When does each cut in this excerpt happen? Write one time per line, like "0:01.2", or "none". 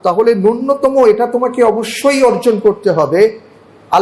none